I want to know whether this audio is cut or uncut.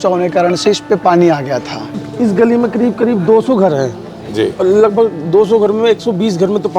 cut